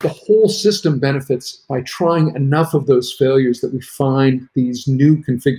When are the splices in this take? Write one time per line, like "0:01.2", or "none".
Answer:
none